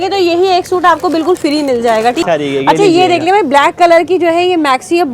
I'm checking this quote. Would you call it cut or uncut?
cut